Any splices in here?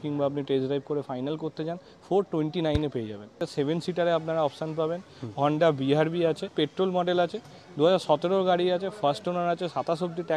yes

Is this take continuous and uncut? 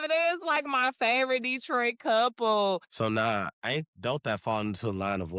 no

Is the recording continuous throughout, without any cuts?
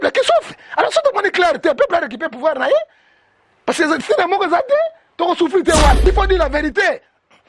no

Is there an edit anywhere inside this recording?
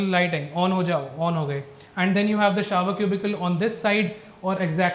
no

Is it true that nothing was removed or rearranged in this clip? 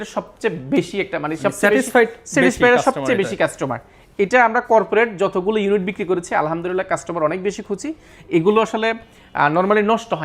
yes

